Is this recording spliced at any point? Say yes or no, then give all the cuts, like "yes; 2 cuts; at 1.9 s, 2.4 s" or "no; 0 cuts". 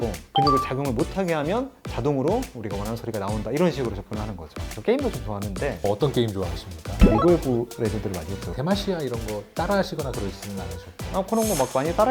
yes; 2 cuts; at 4.6 s, 11.0 s